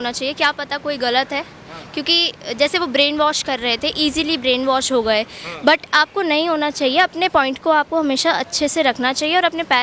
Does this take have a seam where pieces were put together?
no; 0 cuts

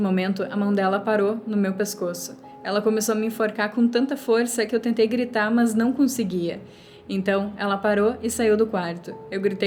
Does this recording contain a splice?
no; 0 cuts

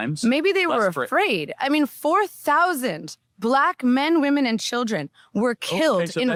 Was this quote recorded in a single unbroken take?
yes; 0 cuts

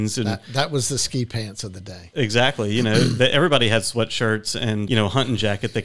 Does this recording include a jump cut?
no; 0 cuts

